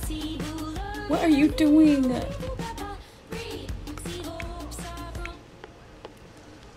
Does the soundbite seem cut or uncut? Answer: uncut